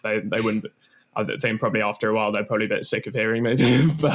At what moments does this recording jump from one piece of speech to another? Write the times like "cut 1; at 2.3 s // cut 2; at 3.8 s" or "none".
none